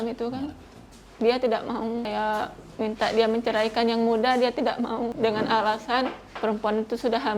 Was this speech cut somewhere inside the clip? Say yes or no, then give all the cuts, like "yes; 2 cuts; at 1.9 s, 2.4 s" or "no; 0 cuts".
yes; 3 cuts; at 2.1 s, 5.1 s, 6.2 s